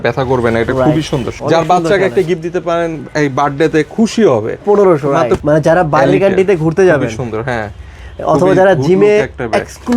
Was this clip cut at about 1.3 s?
yes; 2 cuts; at 1.3 s, 5.4 s

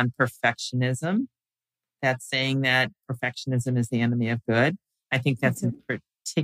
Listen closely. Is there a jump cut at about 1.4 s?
no; 0 cuts

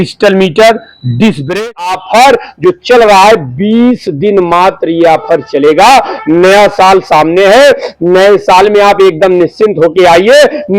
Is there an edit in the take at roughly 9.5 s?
no; 1 cut; at 1.8 s

